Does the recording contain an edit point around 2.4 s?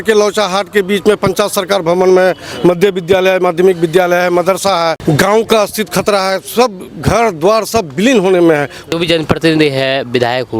no; 2 cuts; at 5.0 s, 8.9 s

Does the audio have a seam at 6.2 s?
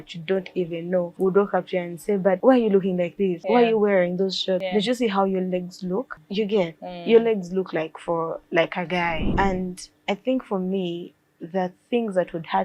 yes; 6 cuts; at 1.1 s, 2.4 s, 3.4 s, 4.7 s, 6.2 s, 9.2 s

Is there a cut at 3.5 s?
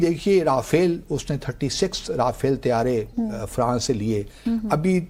no; 0 cuts

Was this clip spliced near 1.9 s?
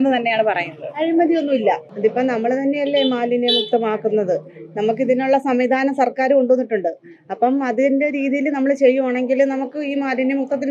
yes; 1 cut; at 1.9 s

